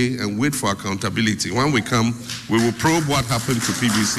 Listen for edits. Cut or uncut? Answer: uncut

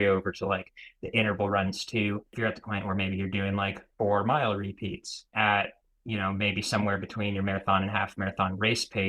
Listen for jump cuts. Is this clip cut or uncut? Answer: cut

